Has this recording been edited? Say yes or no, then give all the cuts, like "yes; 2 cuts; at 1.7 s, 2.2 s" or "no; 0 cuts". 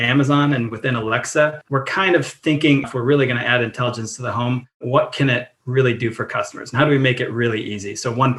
yes; 2 cuts; at 1.6 s, 2.9 s